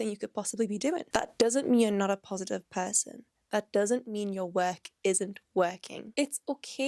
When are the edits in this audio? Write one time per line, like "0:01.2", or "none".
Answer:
0:01.1
0:06.0